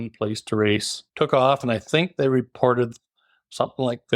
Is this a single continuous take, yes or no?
no